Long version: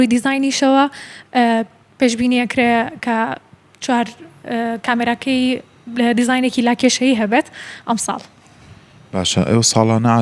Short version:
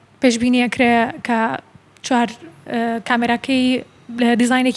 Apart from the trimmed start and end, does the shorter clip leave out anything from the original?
no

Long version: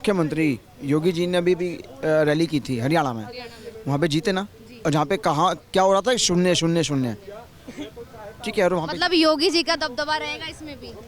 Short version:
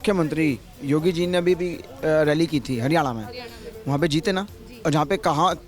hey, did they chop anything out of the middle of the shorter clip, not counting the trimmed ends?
no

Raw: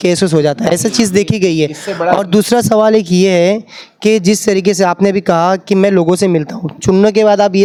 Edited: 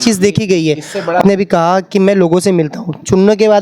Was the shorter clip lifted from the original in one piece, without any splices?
no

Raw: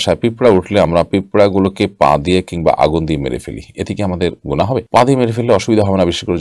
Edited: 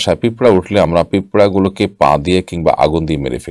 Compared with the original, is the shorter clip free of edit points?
yes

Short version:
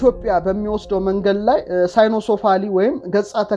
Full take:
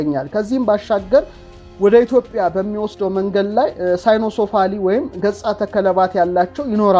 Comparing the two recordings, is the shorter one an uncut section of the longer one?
yes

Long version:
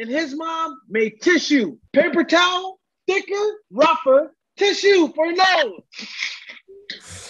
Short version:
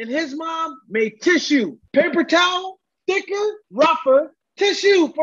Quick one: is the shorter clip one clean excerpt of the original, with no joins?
yes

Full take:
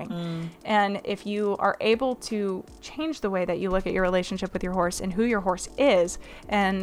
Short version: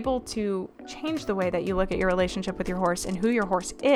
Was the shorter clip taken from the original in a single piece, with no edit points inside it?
yes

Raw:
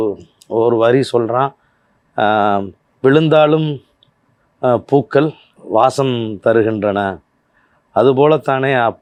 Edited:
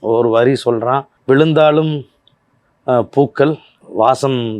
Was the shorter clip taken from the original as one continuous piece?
no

